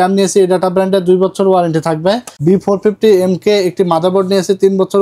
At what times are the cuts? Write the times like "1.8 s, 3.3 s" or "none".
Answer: 2.3 s